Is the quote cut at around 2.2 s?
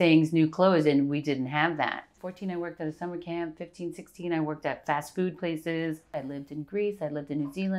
yes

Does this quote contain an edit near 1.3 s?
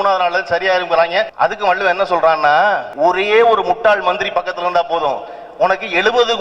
yes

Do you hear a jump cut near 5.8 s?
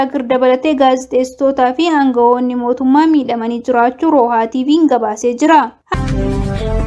yes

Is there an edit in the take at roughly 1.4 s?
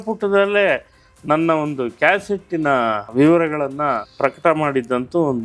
no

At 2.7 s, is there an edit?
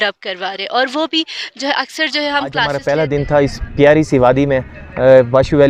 yes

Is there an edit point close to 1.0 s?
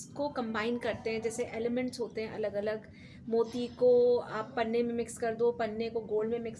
no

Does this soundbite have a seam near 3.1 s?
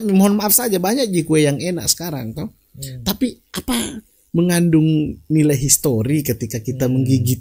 no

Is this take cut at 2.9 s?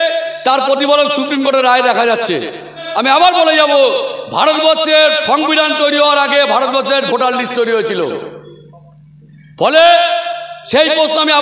yes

